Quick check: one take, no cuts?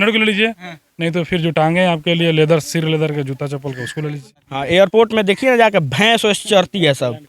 no; 1 cut; at 4.4 s

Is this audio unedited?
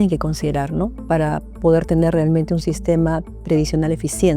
yes; 0 cuts

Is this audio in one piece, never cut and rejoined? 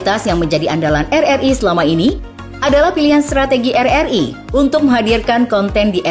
yes; 0 cuts

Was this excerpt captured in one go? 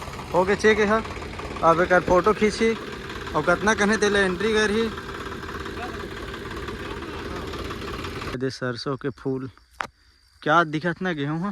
no; 1 cut; at 8.3 s

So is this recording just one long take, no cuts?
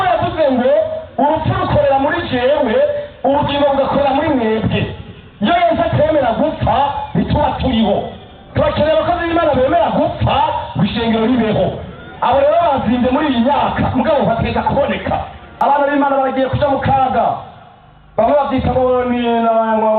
no; 1 cut; at 15.4 s

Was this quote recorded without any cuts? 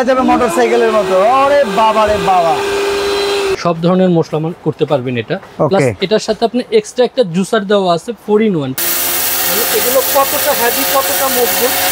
no; 2 cuts; at 3.6 s, 8.7 s

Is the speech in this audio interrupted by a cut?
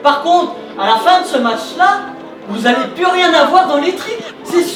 no; 0 cuts

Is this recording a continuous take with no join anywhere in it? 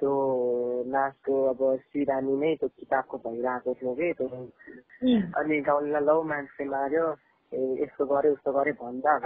no; 1 cut; at 4.8 s

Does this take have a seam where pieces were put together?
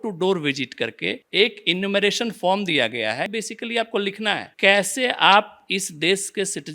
yes; 1 cut; at 3.3 s

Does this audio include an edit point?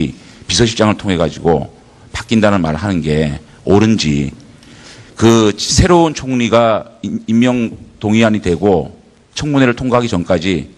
yes; 1 cut; at 5.3 s

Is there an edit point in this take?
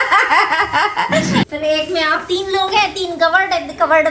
yes; 1 cut; at 1.4 s

